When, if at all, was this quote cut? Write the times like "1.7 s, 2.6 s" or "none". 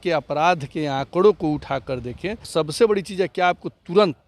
2.4 s